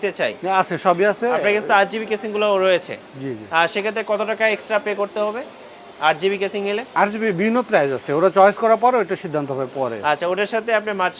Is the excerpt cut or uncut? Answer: uncut